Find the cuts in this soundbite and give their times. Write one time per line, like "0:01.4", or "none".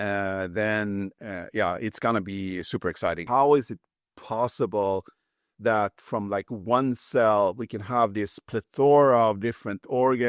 0:03.2